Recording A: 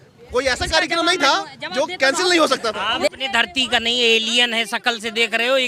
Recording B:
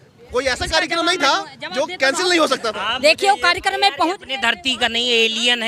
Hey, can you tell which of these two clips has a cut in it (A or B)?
A